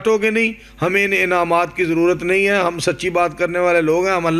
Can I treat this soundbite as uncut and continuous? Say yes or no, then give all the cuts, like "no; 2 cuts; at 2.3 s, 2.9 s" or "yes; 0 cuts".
yes; 0 cuts